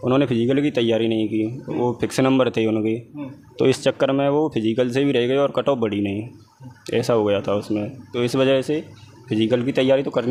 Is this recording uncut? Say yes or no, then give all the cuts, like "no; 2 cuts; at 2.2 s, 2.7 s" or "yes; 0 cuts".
yes; 0 cuts